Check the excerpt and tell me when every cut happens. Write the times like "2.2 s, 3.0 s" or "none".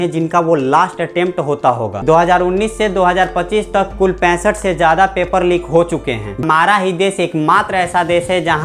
1.9 s, 6.4 s